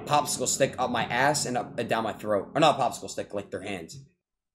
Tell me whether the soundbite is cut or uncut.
uncut